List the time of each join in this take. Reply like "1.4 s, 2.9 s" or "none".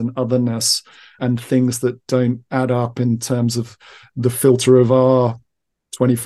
1.2 s